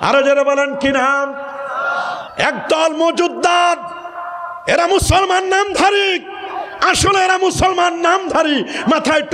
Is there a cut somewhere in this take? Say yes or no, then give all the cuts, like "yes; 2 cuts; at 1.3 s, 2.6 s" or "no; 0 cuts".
yes; 1 cut; at 2.3 s